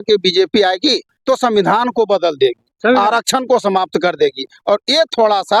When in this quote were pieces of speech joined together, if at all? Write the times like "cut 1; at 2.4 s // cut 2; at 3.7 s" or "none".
none